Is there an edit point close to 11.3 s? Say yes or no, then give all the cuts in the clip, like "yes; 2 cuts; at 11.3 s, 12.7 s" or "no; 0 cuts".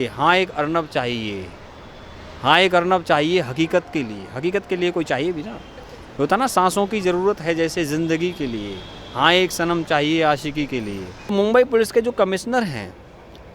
yes; 1 cut; at 11.3 s